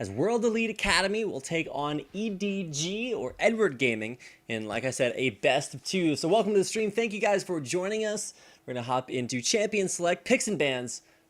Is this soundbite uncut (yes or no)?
no